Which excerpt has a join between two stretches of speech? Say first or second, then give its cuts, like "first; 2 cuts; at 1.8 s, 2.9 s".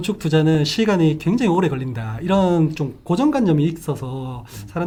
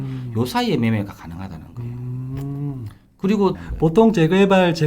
second; 1 cut; at 3.6 s